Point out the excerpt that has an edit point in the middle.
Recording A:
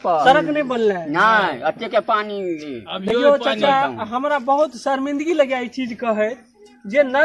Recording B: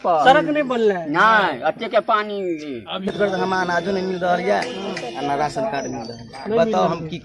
B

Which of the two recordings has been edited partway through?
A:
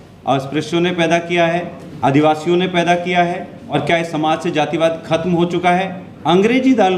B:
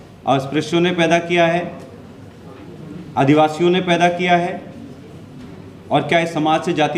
A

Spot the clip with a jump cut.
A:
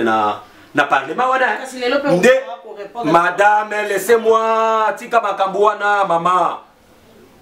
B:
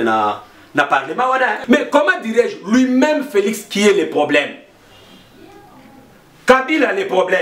B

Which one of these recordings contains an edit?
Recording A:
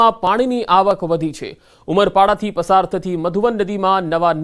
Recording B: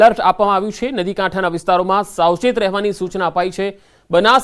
B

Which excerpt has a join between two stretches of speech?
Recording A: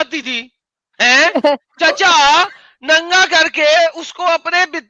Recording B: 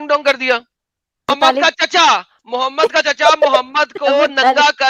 B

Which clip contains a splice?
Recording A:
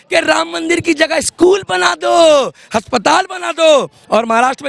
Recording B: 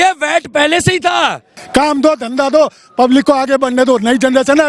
B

